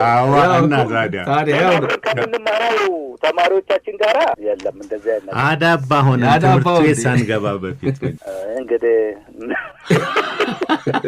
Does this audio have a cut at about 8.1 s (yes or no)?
yes